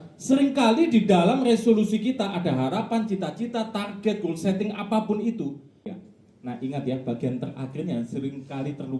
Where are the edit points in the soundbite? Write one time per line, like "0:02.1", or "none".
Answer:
0:06.0

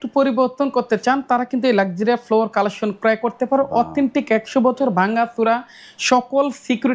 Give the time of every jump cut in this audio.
none

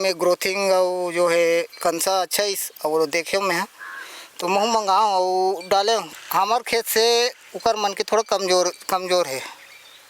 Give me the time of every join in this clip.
0:06.1

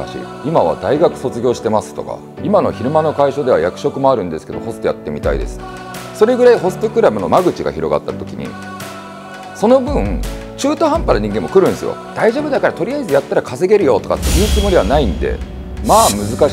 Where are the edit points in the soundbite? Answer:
0:12.0

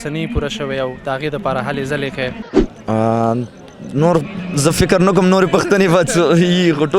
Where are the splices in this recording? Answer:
0:02.5

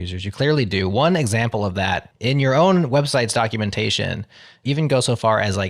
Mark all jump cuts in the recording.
0:02.1

